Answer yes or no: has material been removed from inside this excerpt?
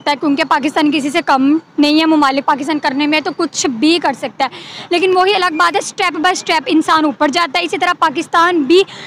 no